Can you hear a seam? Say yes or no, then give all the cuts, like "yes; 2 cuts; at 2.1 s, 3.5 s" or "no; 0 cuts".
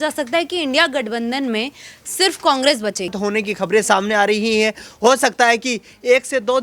yes; 1 cut; at 3.2 s